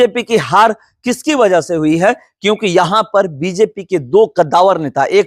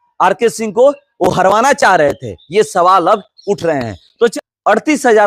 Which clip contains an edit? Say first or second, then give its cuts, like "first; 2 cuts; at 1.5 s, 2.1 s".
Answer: second; 1 cut; at 4.3 s